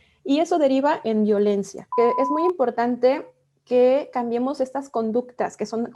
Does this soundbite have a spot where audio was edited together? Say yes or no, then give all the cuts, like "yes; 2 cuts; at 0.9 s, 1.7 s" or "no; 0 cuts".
yes; 1 cut; at 1.9 s